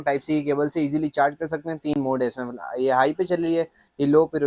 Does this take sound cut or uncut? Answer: uncut